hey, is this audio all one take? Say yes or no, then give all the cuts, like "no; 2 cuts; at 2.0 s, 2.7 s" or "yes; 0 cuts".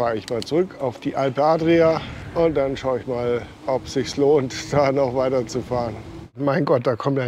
no; 3 cuts; at 2.2 s, 3.5 s, 6.4 s